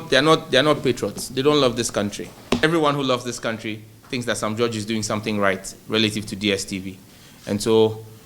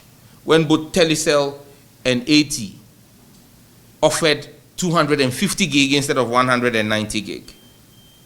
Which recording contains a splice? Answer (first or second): first